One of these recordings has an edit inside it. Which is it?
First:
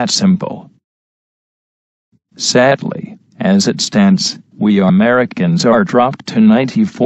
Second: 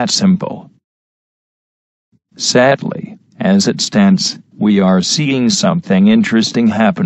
second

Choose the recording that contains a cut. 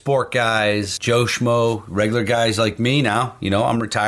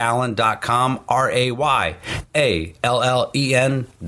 first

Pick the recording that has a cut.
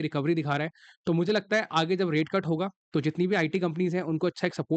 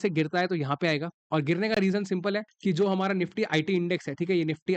second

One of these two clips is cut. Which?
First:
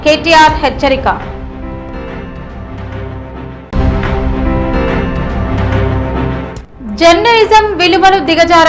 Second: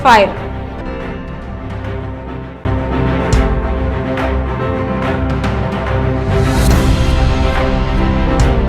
second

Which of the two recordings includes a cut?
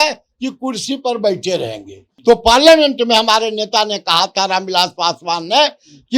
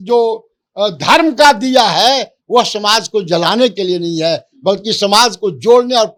first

